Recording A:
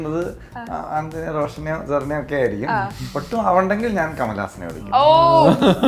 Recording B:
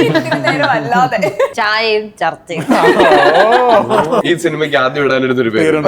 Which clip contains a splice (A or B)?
B